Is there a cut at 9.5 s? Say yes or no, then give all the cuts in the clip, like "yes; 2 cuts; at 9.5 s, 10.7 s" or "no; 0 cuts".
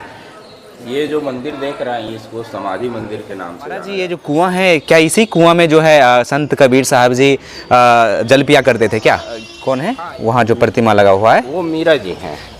yes; 2 cuts; at 3.9 s, 9.5 s